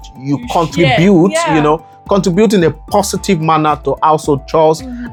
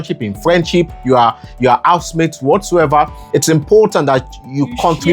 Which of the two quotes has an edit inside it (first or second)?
second